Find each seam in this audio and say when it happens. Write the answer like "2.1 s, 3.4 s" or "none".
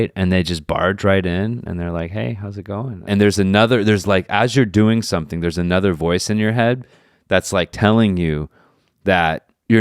3.0 s